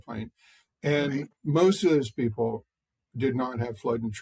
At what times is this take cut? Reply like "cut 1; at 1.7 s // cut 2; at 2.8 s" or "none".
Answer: cut 1; at 1.3 s